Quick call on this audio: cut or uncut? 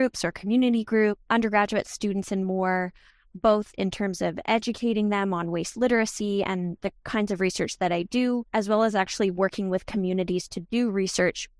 uncut